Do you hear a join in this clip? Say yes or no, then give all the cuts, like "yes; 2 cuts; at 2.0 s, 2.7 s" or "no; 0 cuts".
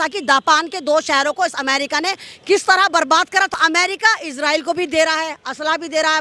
yes; 1 cut; at 3.6 s